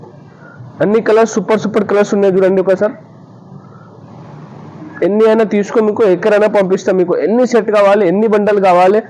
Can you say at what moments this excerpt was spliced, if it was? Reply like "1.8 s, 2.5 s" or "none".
none